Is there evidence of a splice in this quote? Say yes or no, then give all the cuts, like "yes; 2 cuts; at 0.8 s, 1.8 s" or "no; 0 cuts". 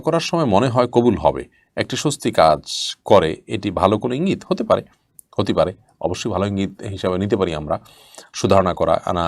no; 0 cuts